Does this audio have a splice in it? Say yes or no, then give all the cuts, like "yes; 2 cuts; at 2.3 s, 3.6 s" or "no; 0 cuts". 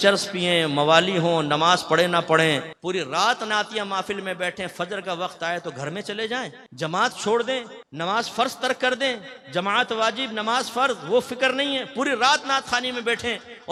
no; 0 cuts